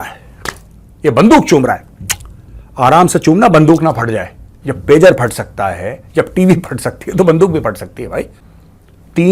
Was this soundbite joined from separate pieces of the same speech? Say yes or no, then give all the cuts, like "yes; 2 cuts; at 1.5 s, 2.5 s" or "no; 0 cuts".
yes; 1 cut; at 8.4 s